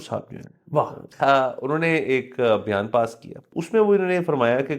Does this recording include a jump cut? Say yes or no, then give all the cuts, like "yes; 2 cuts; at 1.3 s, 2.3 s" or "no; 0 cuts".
yes; 2 cuts; at 1.0 s, 3.5 s